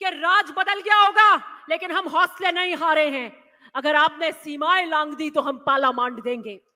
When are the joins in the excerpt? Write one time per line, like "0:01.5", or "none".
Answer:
none